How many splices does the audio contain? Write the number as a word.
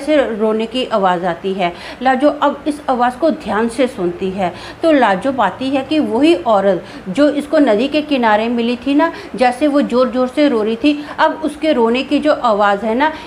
zero